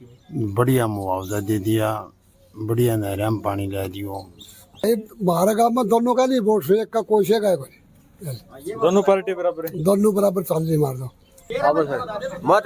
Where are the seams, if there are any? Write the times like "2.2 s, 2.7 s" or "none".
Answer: 4.8 s, 11.4 s